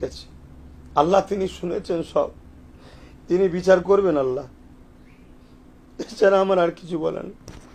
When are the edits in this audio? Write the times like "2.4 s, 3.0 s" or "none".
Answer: none